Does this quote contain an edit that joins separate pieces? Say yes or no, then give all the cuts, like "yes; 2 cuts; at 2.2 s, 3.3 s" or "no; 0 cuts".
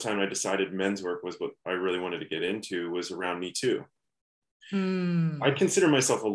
no; 0 cuts